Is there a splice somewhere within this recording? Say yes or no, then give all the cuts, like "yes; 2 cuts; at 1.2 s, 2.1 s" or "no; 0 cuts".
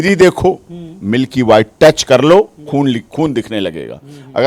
no; 0 cuts